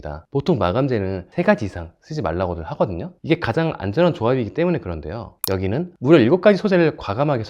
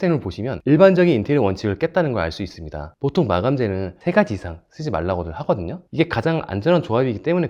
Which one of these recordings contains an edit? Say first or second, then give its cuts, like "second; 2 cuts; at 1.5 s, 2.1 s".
first; 1 cut; at 5.9 s